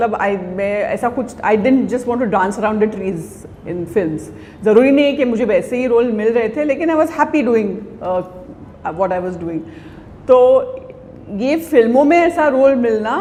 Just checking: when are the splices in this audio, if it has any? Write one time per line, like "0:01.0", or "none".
none